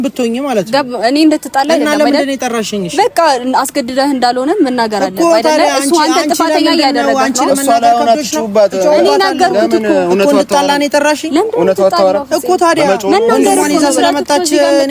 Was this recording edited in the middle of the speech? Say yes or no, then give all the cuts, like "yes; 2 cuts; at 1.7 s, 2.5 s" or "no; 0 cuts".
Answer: no; 0 cuts